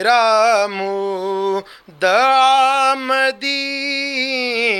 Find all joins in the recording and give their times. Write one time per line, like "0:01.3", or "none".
none